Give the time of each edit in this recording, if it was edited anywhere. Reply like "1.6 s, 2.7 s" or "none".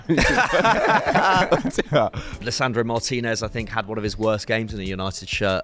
2.4 s